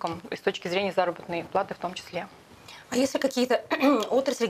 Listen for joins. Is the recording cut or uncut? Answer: uncut